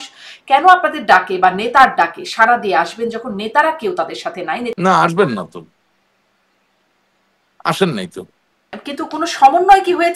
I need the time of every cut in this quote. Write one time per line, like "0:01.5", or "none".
0:04.7
0:08.8